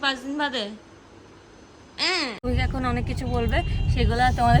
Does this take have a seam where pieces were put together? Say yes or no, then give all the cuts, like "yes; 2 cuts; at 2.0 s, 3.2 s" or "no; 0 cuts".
yes; 1 cut; at 2.4 s